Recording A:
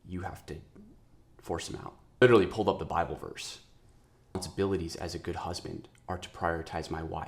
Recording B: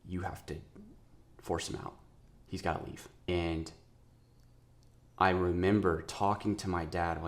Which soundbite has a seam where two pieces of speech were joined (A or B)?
A